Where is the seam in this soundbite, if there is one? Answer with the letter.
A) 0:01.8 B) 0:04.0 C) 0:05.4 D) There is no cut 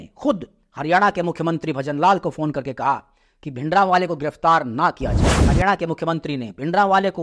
C